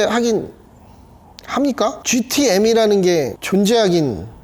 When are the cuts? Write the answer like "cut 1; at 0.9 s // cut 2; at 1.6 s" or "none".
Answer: cut 1; at 3.4 s